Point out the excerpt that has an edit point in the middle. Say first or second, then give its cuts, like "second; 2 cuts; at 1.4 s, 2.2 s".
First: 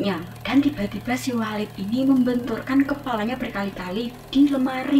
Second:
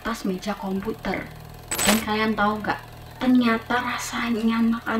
second; 1 cut; at 1.3 s